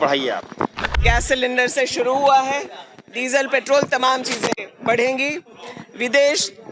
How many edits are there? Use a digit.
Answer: 1